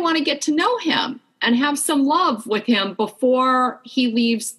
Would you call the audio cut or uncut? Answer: uncut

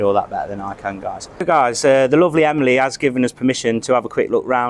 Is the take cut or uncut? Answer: cut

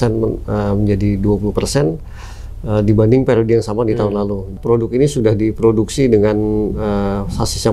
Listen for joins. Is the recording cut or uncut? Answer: cut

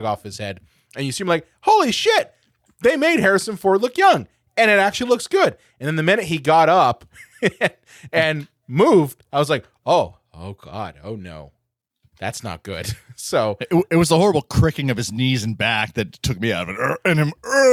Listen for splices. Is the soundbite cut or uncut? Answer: uncut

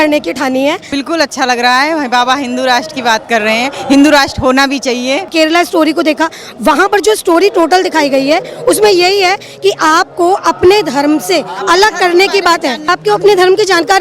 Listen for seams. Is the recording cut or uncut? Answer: cut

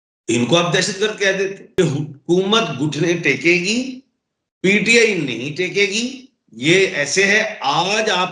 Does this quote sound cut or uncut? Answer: cut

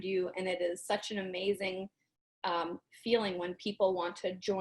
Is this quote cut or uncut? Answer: uncut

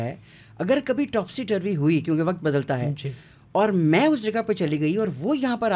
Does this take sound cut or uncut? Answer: uncut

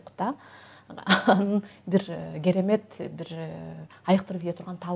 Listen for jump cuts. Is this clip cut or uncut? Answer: uncut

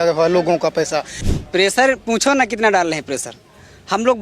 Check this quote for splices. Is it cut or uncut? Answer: cut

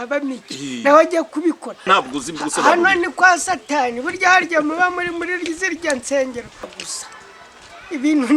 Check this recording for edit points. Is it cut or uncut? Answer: cut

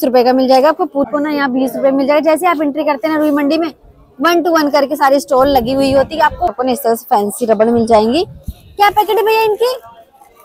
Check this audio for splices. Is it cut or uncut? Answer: cut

